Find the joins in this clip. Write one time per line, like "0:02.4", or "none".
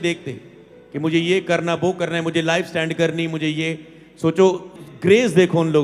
0:04.7